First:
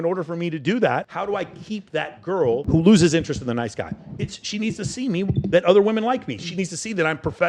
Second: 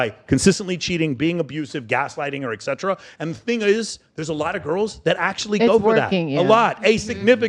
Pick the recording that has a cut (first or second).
first